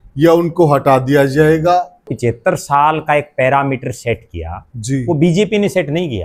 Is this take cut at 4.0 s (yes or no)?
no